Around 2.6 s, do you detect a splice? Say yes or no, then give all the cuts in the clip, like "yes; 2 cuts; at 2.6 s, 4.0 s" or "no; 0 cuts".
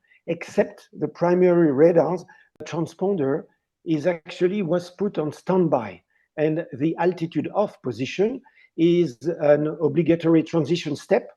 yes; 1 cut; at 2.6 s